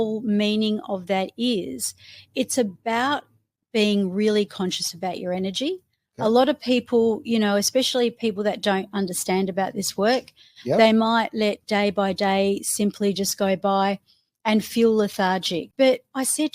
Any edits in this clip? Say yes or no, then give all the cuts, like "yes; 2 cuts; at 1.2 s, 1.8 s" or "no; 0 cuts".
yes; 1 cut; at 15.6 s